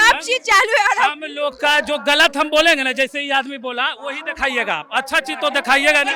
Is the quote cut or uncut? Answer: uncut